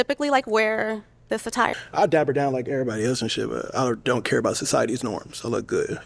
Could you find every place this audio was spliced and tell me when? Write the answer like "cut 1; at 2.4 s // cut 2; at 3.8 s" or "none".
cut 1; at 1.7 s